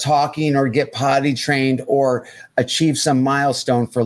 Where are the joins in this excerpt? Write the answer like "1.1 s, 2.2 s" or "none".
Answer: none